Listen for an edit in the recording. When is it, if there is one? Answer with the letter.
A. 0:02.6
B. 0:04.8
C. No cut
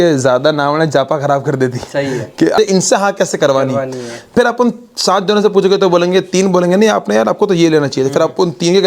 A